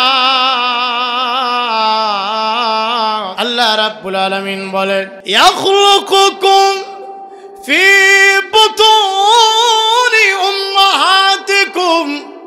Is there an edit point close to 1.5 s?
no; 2 cuts; at 3.3 s, 5.2 s

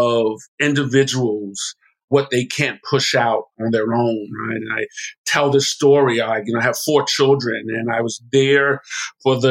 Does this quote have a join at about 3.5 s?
yes; 2 cuts; at 2.1 s, 3.5 s

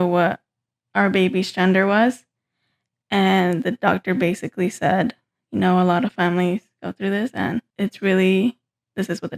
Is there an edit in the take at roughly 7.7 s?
yes; 1 cut; at 7.7 s

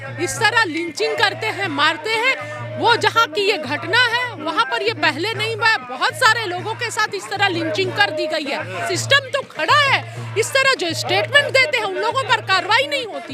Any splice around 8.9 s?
yes; 1 cut; at 8.9 s

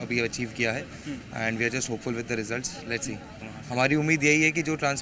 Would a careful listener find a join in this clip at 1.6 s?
no; 1 cut; at 3.5 s

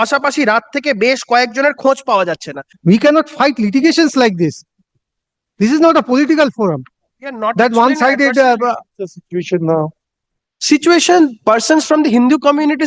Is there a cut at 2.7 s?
yes; 1 cut; at 2.7 s

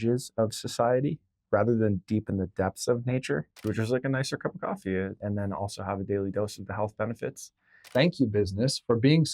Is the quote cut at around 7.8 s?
yes; 3 cuts; at 3.6 s, 5.2 s, 7.8 s

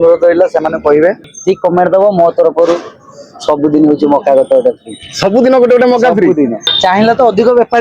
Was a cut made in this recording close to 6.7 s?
yes; 2 cuts; at 1.3 s, 6.7 s

